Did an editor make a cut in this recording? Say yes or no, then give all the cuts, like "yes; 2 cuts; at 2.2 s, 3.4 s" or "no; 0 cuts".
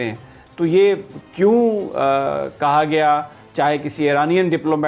no; 0 cuts